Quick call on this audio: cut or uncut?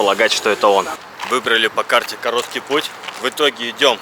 cut